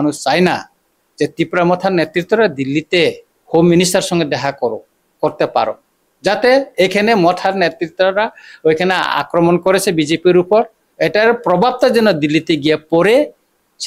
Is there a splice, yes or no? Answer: yes